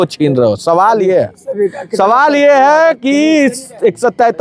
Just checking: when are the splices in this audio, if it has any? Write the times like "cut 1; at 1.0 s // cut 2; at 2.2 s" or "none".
none